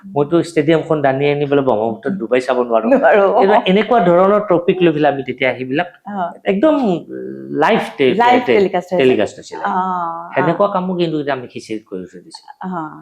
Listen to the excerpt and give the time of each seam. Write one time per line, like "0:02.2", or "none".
none